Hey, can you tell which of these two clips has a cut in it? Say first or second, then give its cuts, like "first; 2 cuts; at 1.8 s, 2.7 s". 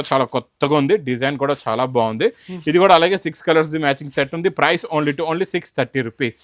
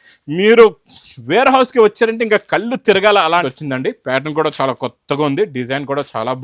second; 1 cut; at 3.4 s